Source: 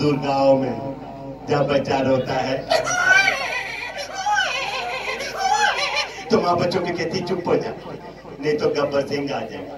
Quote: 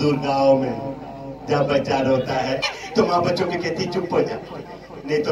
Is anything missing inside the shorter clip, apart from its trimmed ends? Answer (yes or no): yes